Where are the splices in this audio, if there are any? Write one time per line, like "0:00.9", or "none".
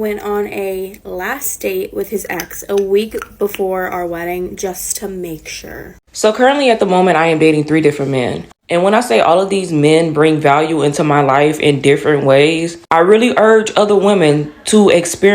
0:06.0